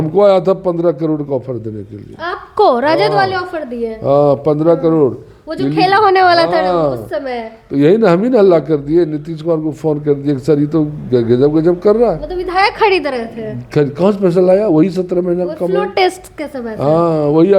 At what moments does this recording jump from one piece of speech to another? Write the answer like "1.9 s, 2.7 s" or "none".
none